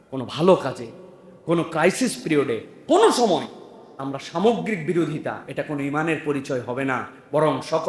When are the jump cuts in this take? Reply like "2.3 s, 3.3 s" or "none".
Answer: none

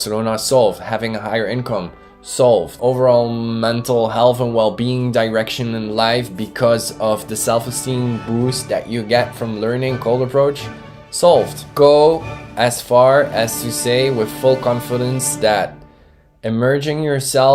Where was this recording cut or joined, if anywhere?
2.7 s

